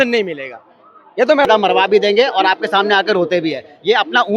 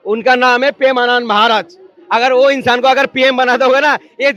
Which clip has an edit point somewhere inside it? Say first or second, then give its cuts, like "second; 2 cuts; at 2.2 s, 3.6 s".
first; 1 cut; at 1.5 s